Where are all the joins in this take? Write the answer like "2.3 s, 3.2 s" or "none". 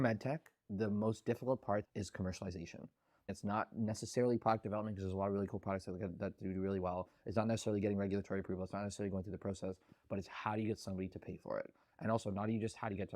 1.8 s, 3.3 s